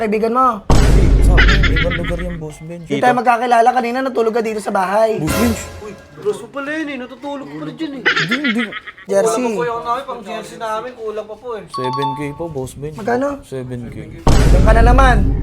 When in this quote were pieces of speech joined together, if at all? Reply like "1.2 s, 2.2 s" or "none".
2.8 s, 9.0 s